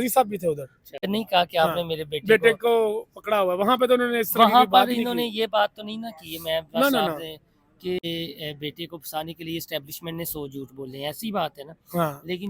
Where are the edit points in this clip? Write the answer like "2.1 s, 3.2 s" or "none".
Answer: 1.1 s, 8.0 s